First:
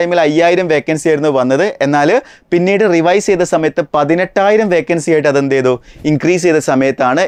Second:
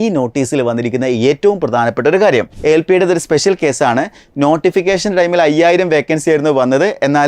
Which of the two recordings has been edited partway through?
second; 1 cut; at 2.5 s

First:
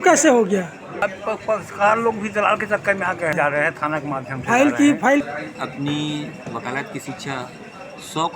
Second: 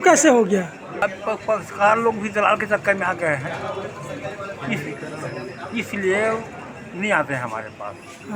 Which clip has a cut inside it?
first; 2 cuts; at 3.3 s, 5.2 s

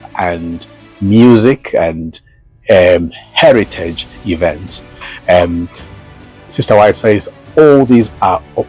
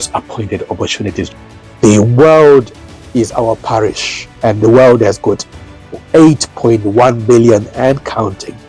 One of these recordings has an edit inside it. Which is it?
second; 1 cut; at 1.3 s

